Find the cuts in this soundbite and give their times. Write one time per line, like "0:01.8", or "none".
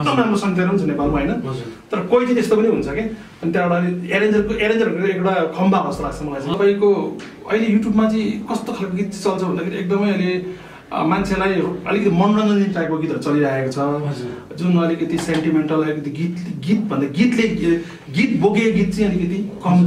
0:06.5